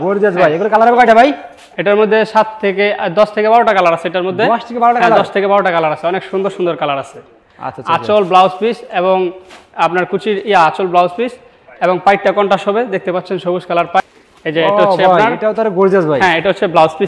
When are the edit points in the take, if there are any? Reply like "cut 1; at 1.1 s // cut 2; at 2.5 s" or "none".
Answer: cut 1; at 14.0 s

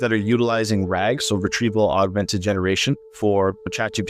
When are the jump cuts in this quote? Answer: cut 1; at 3.1 s

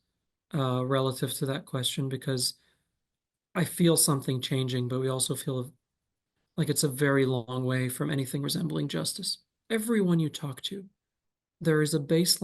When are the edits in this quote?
cut 1; at 9.5 s

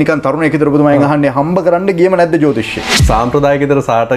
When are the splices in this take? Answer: cut 1; at 2.9 s

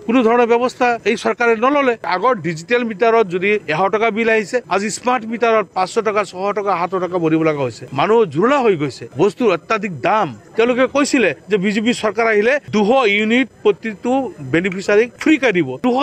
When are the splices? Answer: cut 1; at 2.0 s

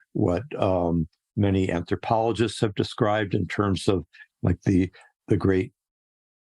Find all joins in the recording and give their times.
cut 1; at 5.1 s

